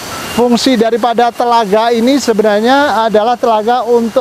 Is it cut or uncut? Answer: uncut